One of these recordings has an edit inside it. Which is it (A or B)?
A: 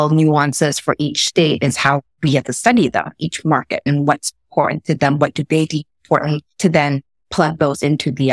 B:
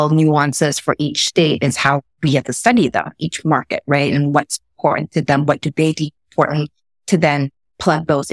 A